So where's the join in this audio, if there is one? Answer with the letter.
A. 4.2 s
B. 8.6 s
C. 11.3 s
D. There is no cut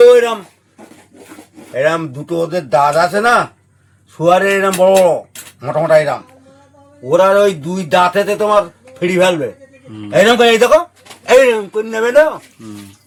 D